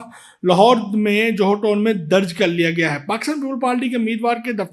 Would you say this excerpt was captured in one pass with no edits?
yes; 0 cuts

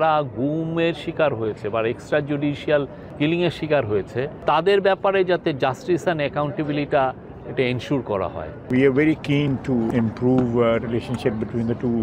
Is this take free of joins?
no; 4 cuts; at 3.0 s, 4.3 s, 8.7 s, 9.9 s

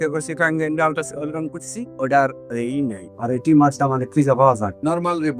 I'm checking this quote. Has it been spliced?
no; 0 cuts

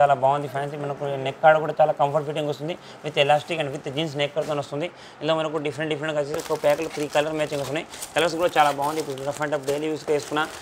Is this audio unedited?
yes; 0 cuts

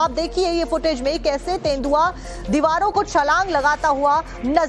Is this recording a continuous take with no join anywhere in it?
no; 1 cut; at 1.2 s

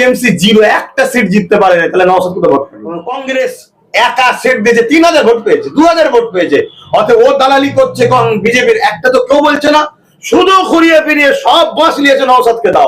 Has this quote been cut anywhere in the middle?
yes; 1 cut; at 3.1 s

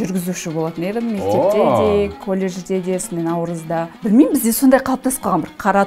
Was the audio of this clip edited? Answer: yes; 1 cut; at 3.9 s

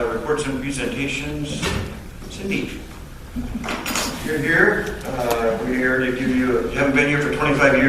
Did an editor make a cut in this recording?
yes; 1 cut; at 5.8 s

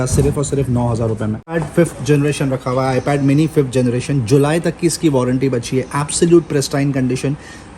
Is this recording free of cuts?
no; 1 cut; at 1.5 s

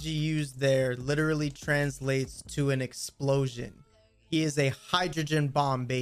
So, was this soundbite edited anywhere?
no; 0 cuts

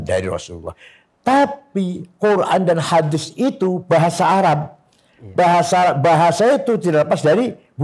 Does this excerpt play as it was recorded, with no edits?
yes; 0 cuts

